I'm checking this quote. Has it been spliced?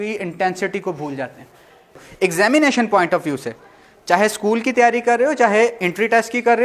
yes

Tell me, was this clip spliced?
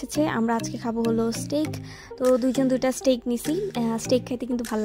no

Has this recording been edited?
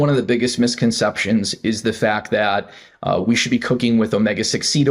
no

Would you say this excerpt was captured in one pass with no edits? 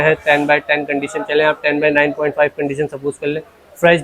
yes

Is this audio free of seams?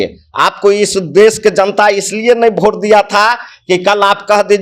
yes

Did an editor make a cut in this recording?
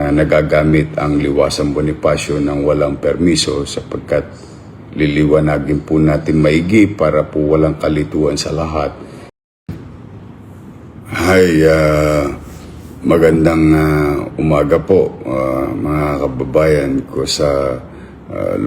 yes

